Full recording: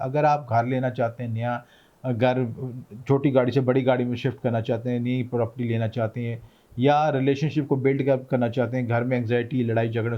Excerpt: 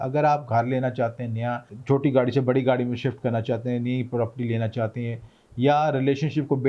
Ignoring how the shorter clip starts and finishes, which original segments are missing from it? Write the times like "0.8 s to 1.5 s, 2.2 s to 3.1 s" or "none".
1.7 s to 2.9 s